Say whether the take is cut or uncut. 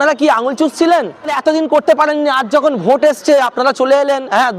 cut